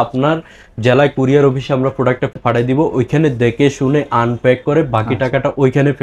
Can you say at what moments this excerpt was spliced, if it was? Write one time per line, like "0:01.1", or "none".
none